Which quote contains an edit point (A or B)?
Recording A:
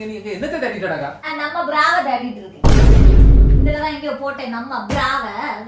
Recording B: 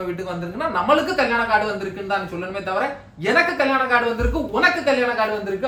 A